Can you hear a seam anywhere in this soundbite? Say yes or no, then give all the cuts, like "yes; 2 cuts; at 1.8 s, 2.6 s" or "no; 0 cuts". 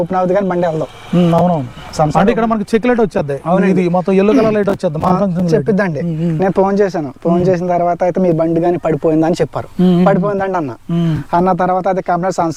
no; 0 cuts